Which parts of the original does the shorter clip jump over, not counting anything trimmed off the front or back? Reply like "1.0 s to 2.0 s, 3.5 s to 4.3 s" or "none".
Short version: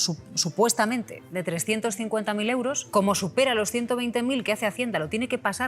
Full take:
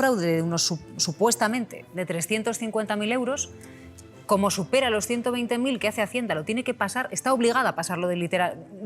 3.4 s to 4.2 s